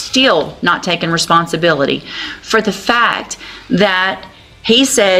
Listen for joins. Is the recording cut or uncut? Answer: uncut